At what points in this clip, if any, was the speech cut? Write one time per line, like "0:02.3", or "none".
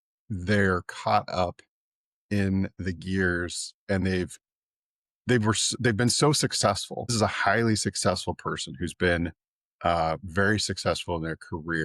0:07.1